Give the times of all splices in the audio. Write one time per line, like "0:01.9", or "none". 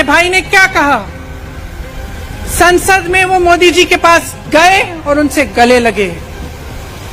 none